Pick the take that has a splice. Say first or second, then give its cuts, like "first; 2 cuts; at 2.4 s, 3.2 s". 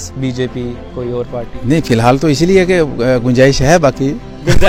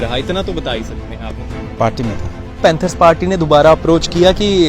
second; 1 cut; at 2.6 s